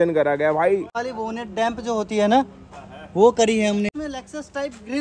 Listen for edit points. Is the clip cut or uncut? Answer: cut